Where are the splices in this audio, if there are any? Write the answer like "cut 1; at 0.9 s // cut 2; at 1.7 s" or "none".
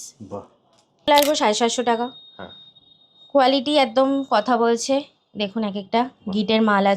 cut 1; at 1.1 s

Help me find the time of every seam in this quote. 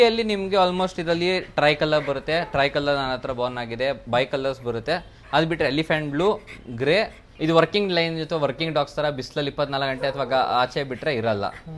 cut 1; at 7.2 s

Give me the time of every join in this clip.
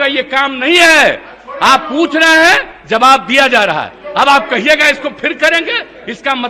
none

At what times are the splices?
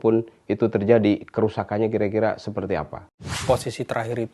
cut 1; at 3.4 s

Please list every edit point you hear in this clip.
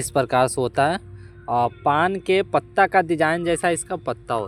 none

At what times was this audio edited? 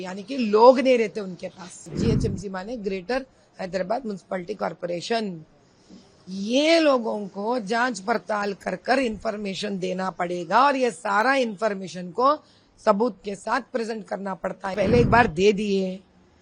cut 1; at 1.9 s // cut 2; at 14.7 s

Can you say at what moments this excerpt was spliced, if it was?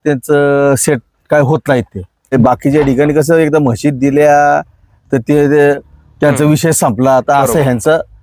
cut 1; at 2.3 s

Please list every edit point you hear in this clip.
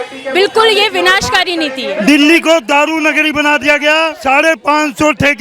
cut 1; at 1.9 s // cut 2; at 4.2 s

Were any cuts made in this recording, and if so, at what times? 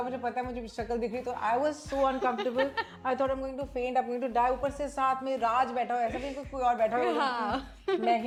none

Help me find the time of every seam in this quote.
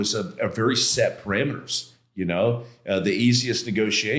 none

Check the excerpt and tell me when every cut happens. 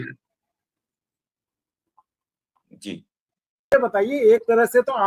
cut 1; at 3.7 s

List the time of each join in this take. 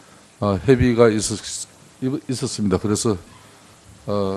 cut 1; at 1.4 s

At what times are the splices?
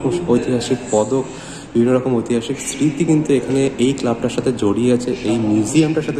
none

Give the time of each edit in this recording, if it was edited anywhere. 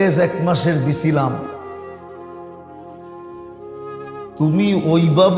none

